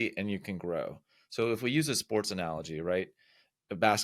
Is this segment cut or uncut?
uncut